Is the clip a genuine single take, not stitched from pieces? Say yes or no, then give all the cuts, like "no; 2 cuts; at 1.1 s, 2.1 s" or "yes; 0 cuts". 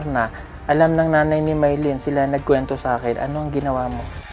yes; 0 cuts